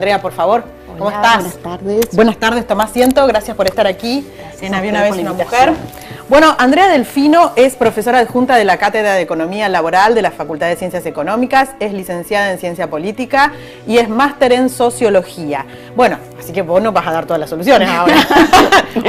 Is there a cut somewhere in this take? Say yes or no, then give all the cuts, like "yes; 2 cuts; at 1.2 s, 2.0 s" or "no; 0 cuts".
yes; 1 cut; at 13.4 s